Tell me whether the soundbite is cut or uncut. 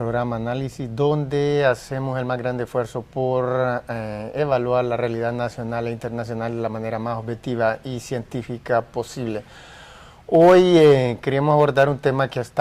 uncut